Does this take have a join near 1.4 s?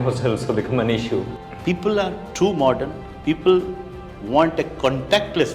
yes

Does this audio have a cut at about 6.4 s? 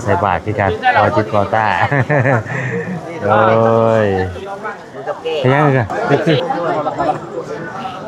yes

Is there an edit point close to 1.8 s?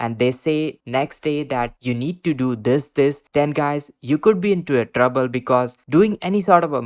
no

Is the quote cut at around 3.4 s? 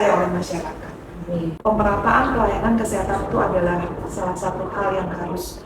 no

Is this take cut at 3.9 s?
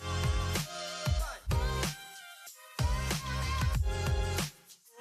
yes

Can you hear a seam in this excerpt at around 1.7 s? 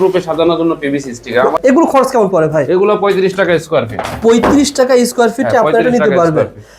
yes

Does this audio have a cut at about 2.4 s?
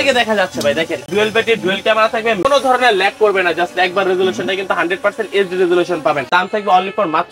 yes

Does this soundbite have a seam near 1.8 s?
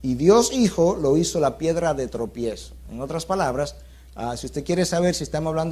yes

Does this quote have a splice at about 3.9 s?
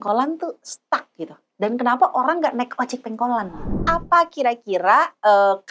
yes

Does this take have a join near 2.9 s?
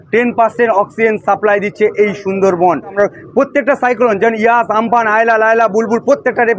yes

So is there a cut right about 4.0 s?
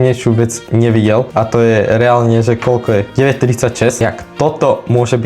yes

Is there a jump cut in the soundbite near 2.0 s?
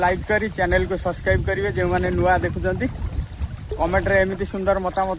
no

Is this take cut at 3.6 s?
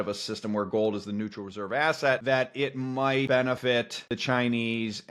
yes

